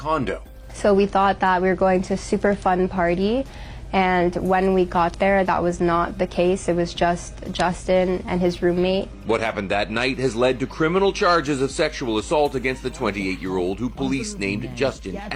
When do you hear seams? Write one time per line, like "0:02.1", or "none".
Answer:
none